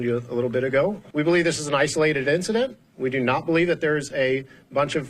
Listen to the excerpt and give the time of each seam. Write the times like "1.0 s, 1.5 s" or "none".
1.0 s